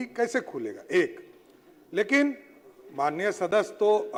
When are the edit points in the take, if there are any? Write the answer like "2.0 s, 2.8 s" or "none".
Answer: none

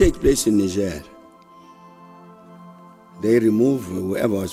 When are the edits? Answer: none

